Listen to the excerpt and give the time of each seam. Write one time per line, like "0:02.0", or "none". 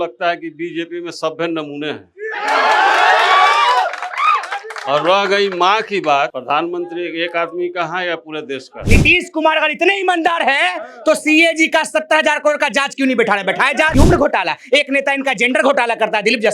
0:06.4
0:08.7
0:13.9